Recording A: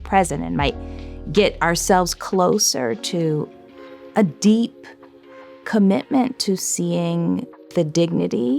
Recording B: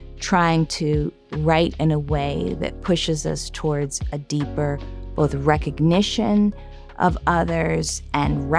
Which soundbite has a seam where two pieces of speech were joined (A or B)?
A